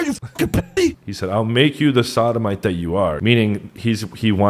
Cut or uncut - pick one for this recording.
cut